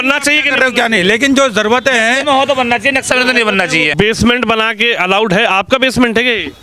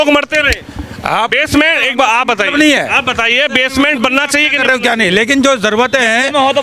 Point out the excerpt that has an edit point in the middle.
first; 1 cut; at 3.9 s

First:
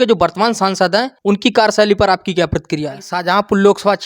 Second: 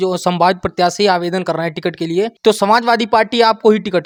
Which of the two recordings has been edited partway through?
first; 2 cuts; at 1.1 s, 3.1 s

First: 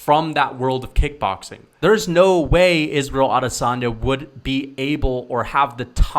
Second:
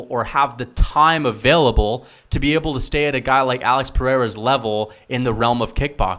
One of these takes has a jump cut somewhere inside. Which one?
first; 1 cut; at 1.6 s

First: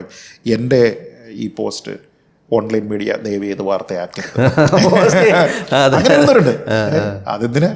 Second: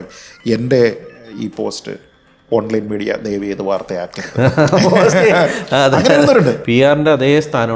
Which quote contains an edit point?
second; 1 cut; at 6.6 s

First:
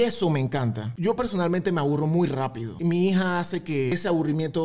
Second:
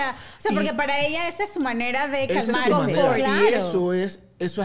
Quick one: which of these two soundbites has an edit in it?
first; 3 cuts; at 0.9 s, 2.6 s, 3.9 s

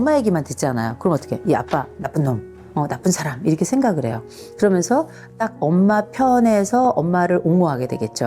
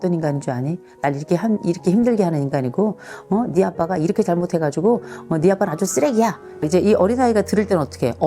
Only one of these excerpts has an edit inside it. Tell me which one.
second; 1 cut; at 6.4 s

